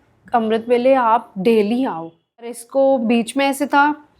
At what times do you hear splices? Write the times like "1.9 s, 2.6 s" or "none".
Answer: 2.6 s